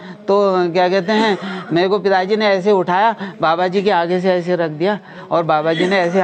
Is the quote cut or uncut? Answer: uncut